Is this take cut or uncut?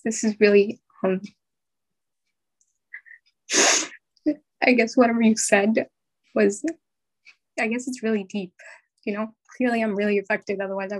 cut